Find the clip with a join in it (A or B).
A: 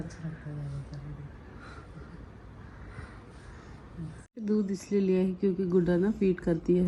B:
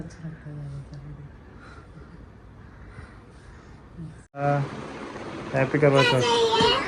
B